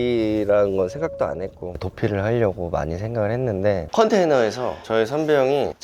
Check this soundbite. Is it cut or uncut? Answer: cut